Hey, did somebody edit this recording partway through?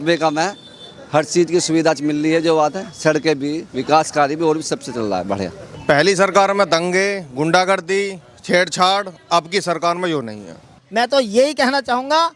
yes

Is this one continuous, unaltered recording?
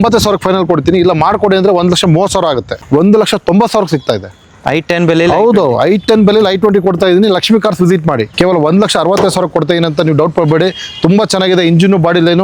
no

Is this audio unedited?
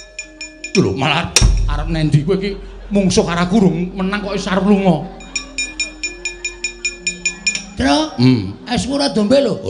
yes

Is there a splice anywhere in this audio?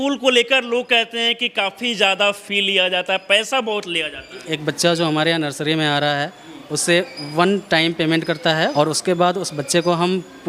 yes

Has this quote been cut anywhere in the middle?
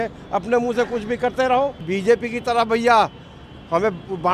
yes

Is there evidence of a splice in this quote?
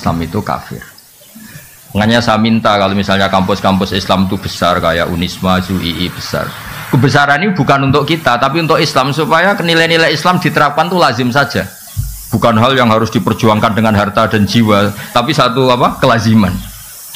no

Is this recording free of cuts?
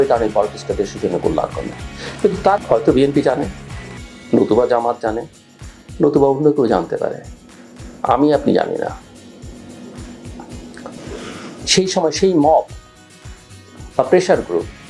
no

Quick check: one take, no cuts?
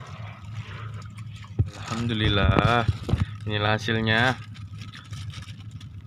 no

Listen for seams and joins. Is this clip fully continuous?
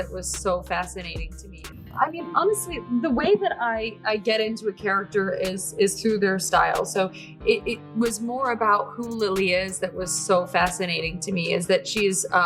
no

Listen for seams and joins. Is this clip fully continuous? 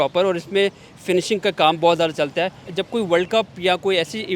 no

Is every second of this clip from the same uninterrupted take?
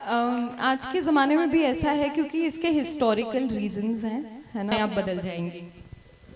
no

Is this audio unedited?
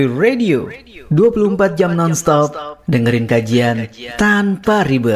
yes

